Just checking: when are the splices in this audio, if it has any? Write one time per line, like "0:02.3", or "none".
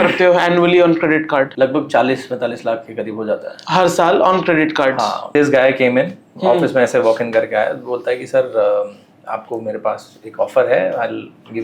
0:01.5
0:05.3